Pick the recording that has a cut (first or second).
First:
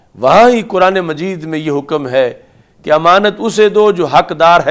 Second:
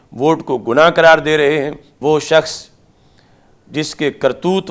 second